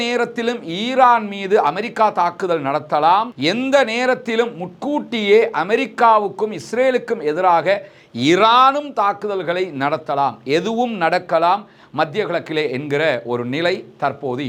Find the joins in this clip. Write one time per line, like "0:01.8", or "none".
none